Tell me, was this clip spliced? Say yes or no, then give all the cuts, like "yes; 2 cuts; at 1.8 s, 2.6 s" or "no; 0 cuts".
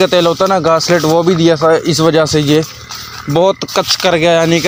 no; 0 cuts